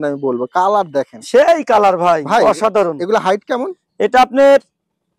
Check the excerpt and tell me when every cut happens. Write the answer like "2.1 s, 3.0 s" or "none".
none